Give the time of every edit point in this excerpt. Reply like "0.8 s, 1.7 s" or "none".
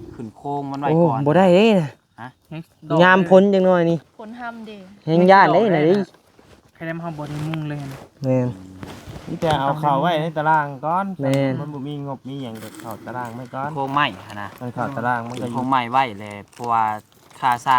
13.7 s, 14.5 s, 15.5 s

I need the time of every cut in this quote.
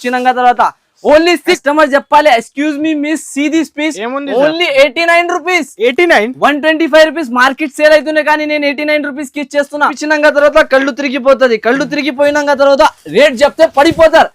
1.6 s, 10.0 s

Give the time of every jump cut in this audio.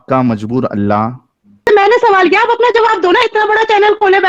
1.6 s

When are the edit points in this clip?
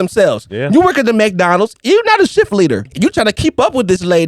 2.9 s

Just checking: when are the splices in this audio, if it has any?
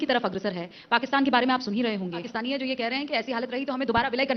2.3 s

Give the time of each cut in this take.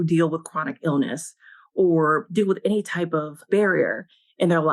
none

